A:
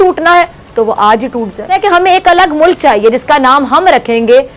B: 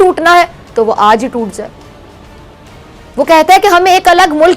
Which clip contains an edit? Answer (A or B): A